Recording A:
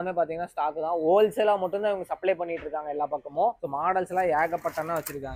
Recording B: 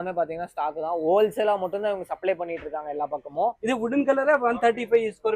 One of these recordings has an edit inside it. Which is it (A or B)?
B